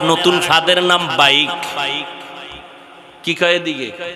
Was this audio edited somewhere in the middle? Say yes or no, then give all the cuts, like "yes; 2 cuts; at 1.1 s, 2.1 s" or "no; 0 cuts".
no; 0 cuts